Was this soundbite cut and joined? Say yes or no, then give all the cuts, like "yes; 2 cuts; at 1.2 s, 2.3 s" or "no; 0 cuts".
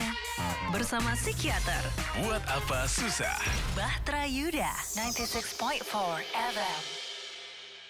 no; 0 cuts